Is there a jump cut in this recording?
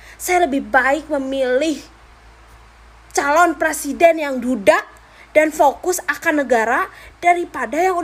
no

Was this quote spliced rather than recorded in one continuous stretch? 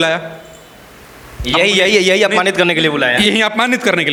no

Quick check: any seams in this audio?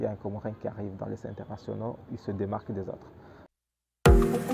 yes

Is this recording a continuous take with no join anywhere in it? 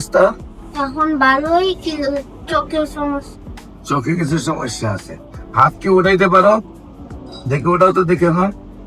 yes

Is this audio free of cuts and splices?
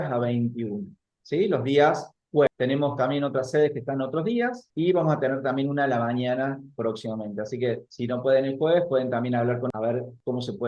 no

